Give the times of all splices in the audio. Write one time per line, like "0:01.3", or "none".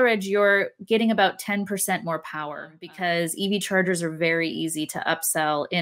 0:02.8